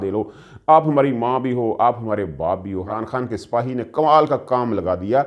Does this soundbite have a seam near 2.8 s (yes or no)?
yes